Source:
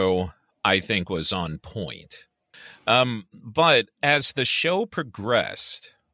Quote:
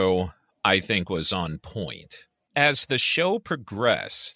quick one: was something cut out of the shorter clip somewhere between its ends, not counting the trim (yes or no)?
yes